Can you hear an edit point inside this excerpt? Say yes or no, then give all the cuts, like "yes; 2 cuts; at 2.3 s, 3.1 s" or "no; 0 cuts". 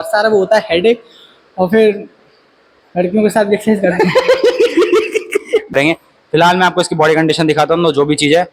yes; 1 cut; at 5.7 s